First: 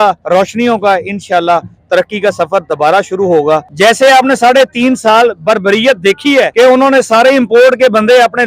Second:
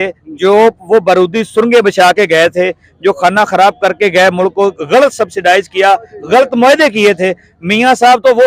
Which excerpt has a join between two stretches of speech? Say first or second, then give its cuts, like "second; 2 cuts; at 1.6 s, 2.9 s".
first; 2 cuts; at 3.7 s, 6.5 s